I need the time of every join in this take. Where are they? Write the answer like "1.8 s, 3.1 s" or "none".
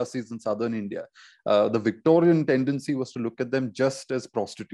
none